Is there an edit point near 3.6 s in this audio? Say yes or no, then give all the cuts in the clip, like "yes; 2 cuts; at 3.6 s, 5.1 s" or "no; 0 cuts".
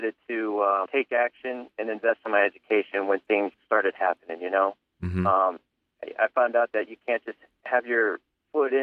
yes; 2 cuts; at 0.9 s, 3.6 s